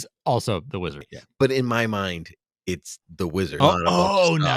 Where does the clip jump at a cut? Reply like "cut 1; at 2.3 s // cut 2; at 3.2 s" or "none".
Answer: cut 1; at 1.1 s // cut 2; at 3.6 s